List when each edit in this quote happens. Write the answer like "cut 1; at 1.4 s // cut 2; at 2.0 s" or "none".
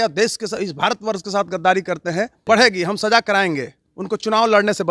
cut 1; at 2.4 s